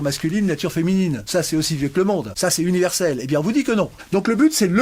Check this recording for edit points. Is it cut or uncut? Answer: cut